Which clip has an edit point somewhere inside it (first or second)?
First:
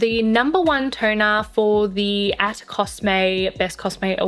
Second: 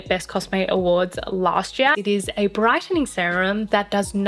second